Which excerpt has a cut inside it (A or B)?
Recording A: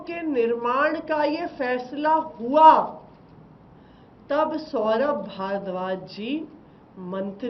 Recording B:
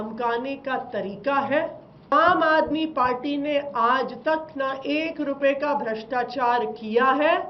B